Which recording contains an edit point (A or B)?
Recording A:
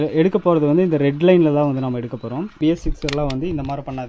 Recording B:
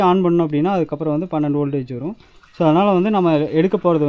A